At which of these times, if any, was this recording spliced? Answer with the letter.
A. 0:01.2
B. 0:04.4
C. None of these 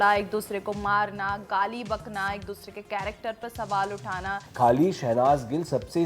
B